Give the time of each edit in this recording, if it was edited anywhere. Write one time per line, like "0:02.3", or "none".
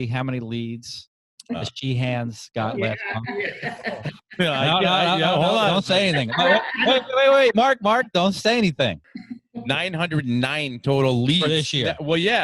0:09.1